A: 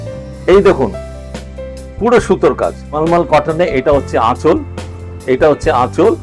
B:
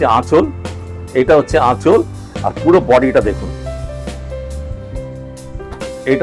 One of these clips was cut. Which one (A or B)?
A